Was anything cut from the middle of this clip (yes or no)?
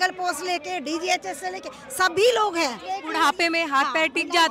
yes